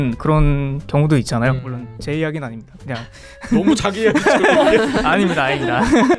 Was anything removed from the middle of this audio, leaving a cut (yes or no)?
no